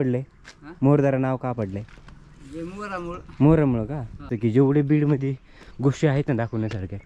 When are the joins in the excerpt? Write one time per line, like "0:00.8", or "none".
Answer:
0:04.3